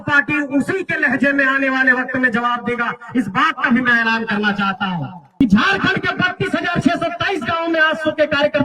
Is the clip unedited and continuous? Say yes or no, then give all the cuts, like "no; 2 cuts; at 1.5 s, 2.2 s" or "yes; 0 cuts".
no; 1 cut; at 5.3 s